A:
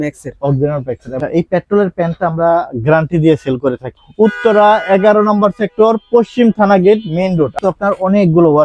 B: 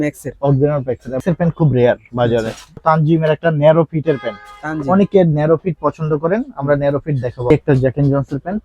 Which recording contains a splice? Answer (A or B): A